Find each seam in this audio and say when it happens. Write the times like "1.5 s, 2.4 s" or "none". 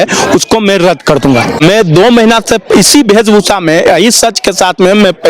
1.6 s